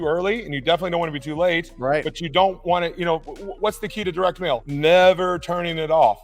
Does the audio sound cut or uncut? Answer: cut